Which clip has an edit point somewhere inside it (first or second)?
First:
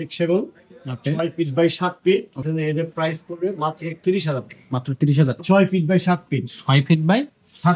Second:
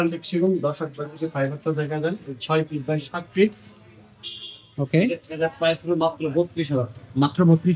first